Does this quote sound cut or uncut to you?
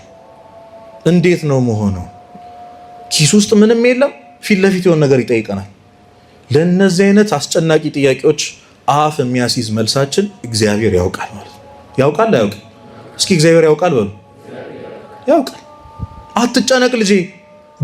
uncut